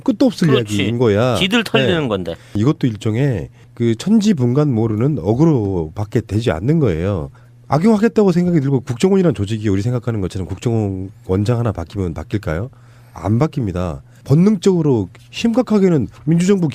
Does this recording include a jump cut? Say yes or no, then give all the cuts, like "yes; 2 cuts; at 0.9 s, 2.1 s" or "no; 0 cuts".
no; 0 cuts